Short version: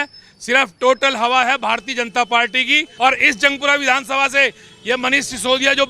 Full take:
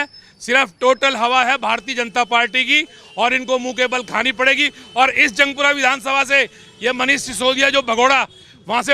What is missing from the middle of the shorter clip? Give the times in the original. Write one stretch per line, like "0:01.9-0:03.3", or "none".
0:02.8-0:04.8